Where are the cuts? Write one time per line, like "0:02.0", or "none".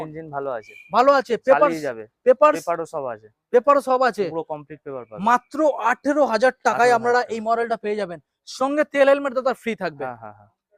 none

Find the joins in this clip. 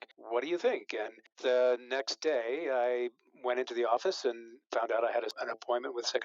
0:01.3
0:05.3

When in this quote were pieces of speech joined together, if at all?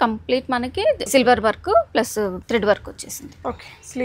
0:01.0
0:02.4

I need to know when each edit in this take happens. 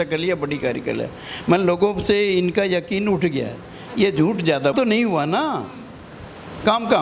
0:04.7

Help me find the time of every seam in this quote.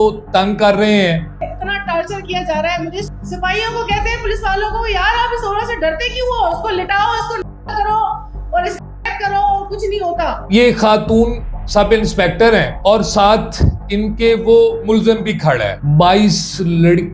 0:01.5
0:03.1
0:10.4
0:15.7

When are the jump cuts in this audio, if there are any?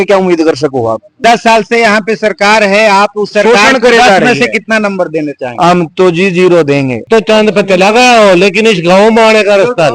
0:01.2
0:07.1

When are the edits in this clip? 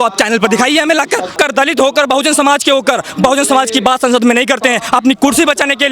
0:01.3

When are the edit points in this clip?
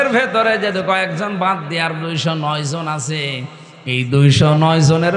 none

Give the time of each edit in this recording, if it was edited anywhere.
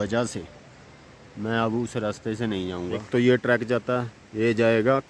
0:03.0

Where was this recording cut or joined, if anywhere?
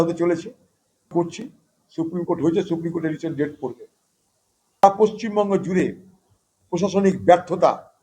0:01.1
0:04.8

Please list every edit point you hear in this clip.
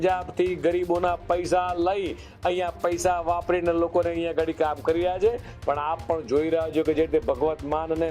none

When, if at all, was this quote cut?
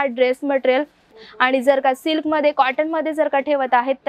0:01.1

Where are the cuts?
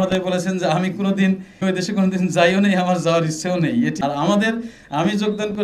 0:01.6
0:04.0

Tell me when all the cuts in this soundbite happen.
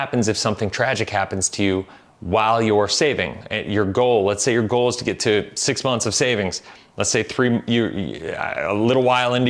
none

